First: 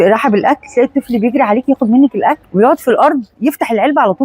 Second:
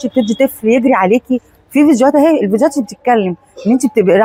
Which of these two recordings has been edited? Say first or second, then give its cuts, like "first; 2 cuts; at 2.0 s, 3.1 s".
first; 1 cut; at 2.4 s